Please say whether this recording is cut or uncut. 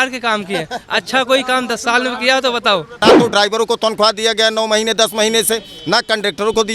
cut